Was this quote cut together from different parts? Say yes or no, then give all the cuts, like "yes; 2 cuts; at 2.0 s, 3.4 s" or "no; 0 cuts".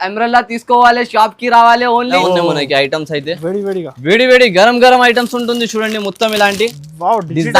yes; 1 cut; at 2.2 s